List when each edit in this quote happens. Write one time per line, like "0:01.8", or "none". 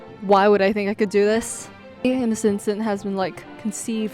0:02.0